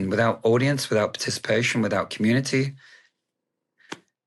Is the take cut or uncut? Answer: uncut